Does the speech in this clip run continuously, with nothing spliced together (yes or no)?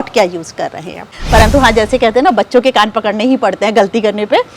no